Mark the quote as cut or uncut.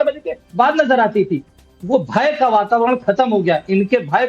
cut